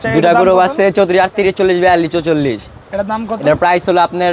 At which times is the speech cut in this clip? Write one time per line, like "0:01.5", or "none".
none